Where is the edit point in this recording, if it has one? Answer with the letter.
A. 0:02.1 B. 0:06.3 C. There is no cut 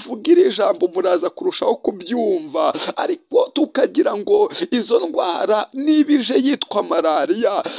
C